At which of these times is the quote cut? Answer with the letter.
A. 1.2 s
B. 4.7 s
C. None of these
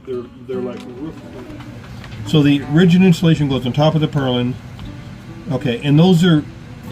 A